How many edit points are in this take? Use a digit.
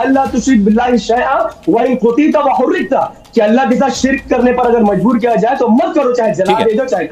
0